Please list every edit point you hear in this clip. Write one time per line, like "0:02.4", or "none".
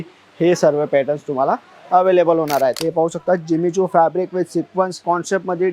0:02.8